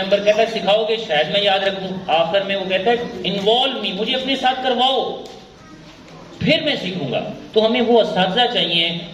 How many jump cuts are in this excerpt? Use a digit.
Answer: 0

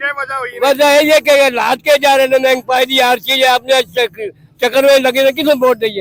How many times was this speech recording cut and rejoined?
0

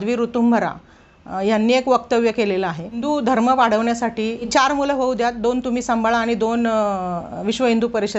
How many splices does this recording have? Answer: 2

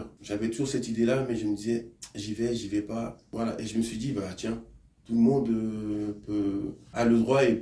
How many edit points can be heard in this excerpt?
1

